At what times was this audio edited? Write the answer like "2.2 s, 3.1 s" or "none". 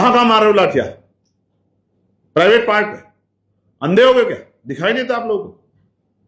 none